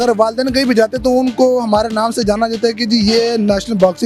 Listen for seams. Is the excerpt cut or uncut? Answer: uncut